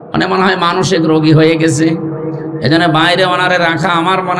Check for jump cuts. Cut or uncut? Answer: uncut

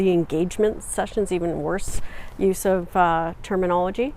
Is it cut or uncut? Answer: uncut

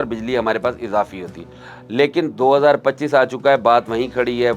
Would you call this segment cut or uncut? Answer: uncut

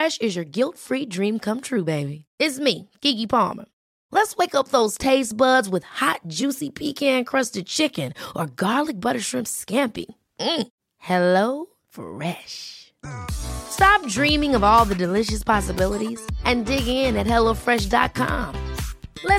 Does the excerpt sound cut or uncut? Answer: uncut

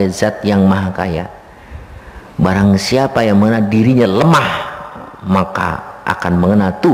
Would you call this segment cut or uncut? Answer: uncut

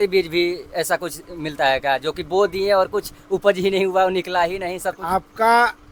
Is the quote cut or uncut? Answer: uncut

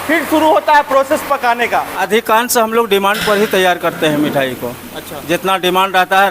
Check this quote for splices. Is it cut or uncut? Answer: cut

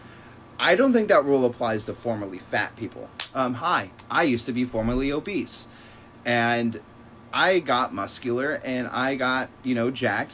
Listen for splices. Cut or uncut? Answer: cut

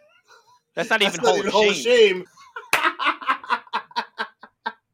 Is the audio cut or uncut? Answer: cut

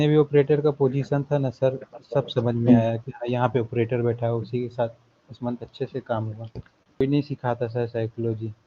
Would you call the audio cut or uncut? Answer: cut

